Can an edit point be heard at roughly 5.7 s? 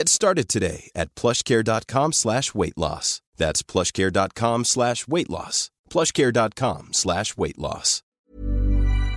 no; 1 cut; at 8.1 s

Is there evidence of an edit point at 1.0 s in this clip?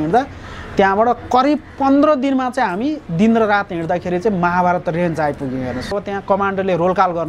no; 1 cut; at 6.0 s

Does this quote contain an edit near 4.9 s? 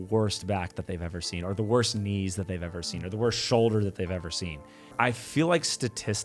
yes; 1 cut; at 4.9 s

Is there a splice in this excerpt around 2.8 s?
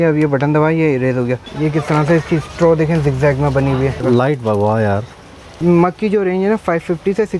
no; 3 cuts; at 1.5 s, 4.0 s, 5.5 s

